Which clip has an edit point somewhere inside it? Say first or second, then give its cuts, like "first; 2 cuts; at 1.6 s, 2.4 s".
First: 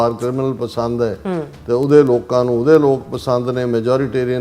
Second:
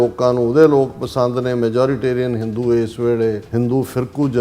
second; 1 cut; at 3.4 s